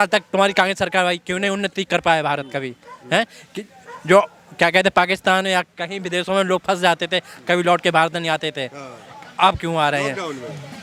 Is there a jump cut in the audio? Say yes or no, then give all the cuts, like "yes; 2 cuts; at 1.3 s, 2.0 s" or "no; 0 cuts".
no; 0 cuts